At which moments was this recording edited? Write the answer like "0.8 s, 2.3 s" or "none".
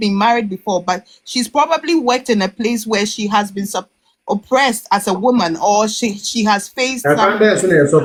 none